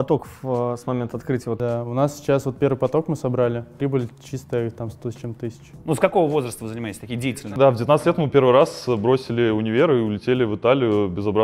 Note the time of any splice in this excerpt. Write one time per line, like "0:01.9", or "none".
0:01.6
0:03.7
0:05.7
0:07.3